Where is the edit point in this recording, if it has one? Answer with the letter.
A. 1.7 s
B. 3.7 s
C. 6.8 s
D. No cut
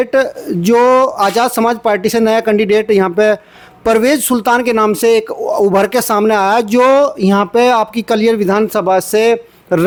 D